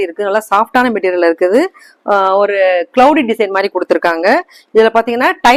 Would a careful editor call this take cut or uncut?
uncut